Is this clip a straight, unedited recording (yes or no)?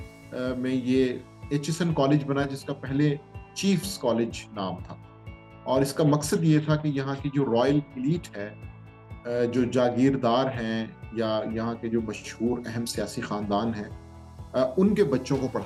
yes